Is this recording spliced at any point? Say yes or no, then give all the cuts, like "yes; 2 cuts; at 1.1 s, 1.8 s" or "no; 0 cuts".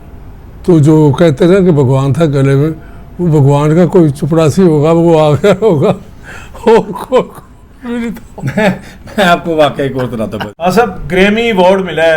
yes; 1 cut; at 10.4 s